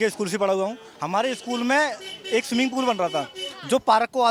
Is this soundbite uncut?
yes; 0 cuts

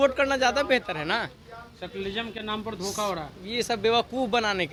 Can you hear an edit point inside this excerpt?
no; 0 cuts

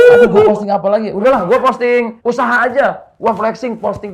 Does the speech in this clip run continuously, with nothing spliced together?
no; 2 cuts; at 1.1 s, 2.1 s

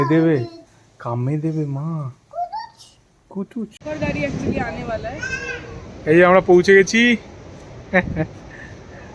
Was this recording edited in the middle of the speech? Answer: yes; 1 cut; at 3.8 s

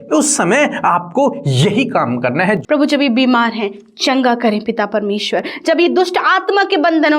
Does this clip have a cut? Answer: yes; 1 cut; at 2.6 s

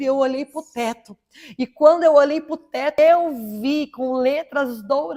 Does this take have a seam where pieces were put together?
no; 0 cuts

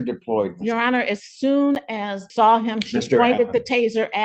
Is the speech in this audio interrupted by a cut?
yes; 1 cut; at 2.2 s

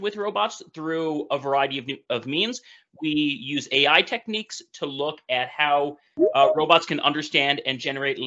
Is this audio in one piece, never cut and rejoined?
yes; 0 cuts

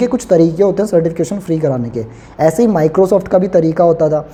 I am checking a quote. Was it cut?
no; 0 cuts

